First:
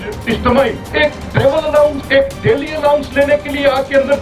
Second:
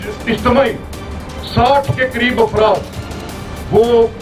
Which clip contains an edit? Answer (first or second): first